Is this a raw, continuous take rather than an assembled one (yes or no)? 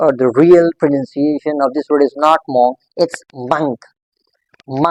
yes